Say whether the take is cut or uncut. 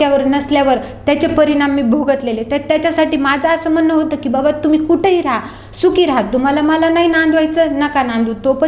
uncut